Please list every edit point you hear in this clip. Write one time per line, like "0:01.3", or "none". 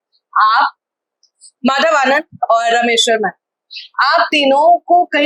0:01.3